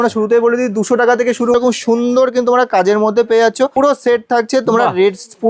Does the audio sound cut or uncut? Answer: cut